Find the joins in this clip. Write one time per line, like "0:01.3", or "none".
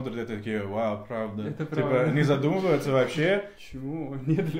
0:03.6